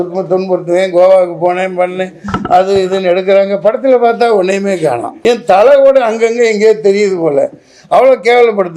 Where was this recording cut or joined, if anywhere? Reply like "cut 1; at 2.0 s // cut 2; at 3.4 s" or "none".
cut 1; at 5.1 s